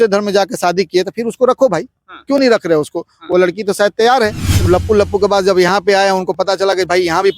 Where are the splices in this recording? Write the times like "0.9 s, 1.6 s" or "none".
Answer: 4.7 s